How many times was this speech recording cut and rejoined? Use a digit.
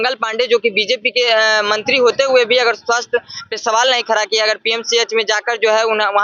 0